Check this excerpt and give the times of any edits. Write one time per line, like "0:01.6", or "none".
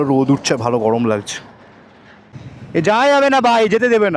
0:02.4